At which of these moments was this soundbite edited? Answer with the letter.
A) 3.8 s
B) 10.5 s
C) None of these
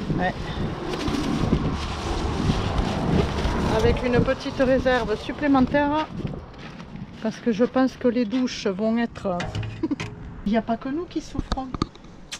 B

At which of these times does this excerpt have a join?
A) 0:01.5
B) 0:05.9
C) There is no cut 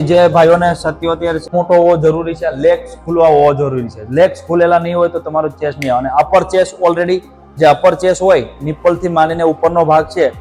A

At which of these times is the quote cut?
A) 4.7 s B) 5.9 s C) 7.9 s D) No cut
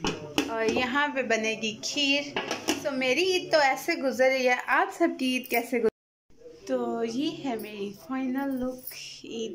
B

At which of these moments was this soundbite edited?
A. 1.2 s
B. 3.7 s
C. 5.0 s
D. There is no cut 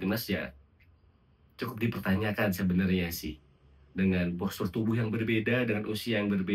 D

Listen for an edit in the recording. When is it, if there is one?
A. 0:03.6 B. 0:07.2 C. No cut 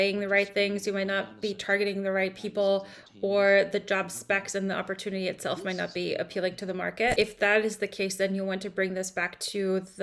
B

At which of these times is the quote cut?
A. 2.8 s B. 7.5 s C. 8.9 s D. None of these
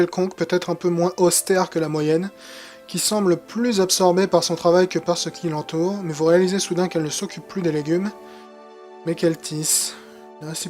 C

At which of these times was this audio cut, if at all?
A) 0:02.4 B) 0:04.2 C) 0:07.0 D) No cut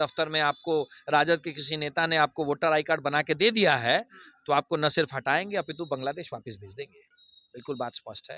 D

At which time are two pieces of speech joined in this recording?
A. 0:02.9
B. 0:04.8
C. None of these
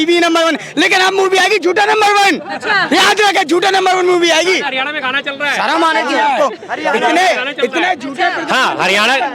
C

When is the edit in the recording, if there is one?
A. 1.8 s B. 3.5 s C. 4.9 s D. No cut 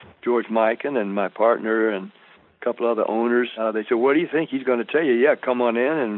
B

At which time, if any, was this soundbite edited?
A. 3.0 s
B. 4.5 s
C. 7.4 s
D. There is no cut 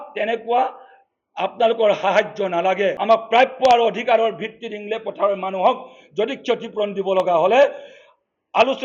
A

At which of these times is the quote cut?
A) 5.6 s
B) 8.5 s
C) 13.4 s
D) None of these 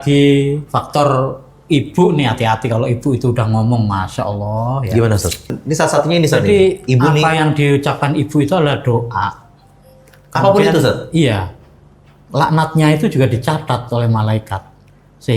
A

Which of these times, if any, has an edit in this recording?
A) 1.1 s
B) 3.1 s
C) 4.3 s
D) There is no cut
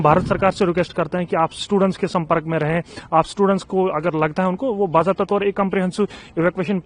D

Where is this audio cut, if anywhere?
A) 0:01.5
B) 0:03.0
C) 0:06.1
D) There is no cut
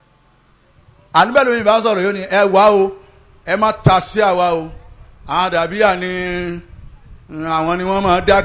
D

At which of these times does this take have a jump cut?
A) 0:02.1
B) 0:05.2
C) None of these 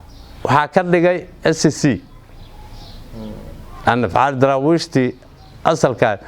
C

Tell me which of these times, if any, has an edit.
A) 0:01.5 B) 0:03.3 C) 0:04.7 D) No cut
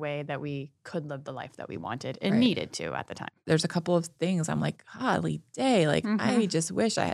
B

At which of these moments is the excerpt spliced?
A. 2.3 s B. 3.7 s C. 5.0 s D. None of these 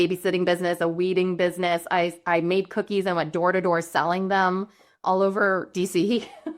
C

